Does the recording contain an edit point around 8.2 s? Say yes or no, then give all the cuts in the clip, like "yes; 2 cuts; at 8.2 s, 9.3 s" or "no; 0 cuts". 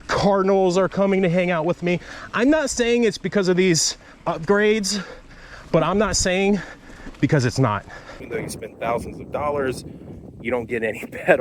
yes; 1 cut; at 8.2 s